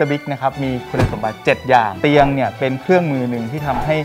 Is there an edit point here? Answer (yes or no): yes